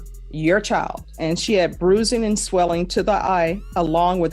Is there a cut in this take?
yes; 1 cut; at 1.1 s

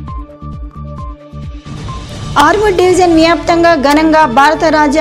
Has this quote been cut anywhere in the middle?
no; 0 cuts

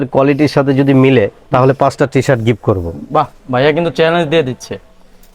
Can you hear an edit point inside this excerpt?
no; 0 cuts

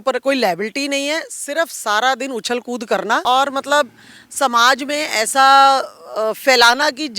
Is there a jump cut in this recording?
yes; 1 cut; at 3.2 s

